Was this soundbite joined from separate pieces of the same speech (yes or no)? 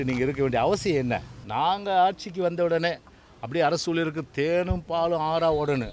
yes